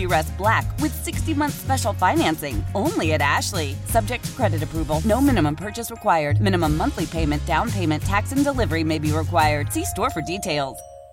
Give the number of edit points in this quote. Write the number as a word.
zero